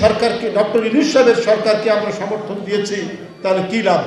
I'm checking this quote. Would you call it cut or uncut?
uncut